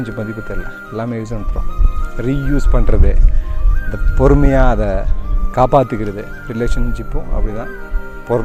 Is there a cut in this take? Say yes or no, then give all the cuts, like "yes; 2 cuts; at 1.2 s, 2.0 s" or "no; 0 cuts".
no; 0 cuts